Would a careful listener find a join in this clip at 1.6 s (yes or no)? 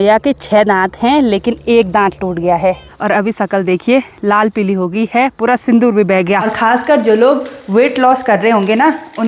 no